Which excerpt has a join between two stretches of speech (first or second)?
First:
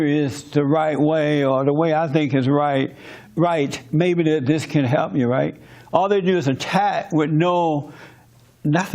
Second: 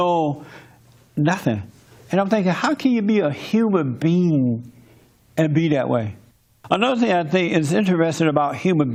first